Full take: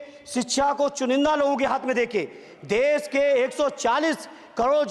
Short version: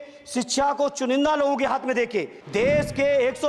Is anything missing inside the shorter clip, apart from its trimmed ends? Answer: yes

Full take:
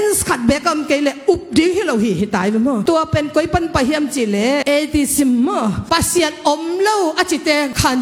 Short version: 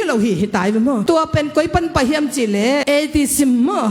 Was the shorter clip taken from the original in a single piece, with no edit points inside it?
yes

